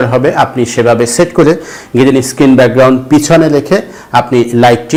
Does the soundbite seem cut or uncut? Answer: uncut